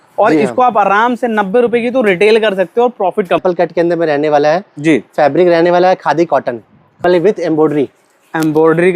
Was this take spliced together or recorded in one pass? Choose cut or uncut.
cut